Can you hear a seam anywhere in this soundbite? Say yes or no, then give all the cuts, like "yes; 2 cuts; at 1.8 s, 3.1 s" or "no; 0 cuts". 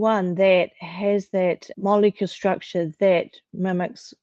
no; 0 cuts